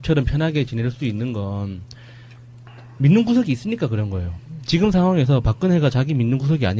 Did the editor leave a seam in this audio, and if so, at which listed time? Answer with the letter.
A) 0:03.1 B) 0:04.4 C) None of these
A